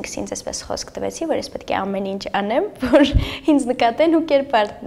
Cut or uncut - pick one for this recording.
uncut